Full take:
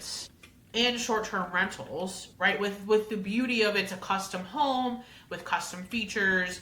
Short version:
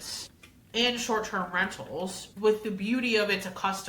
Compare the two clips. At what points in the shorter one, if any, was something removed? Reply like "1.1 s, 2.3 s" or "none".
2.3 s